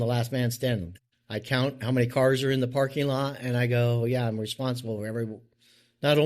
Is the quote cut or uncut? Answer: cut